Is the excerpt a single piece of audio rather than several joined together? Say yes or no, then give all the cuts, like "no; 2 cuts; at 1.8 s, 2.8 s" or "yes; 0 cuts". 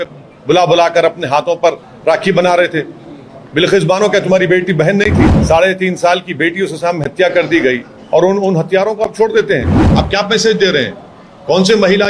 no; 2 cuts; at 5.3 s, 9.8 s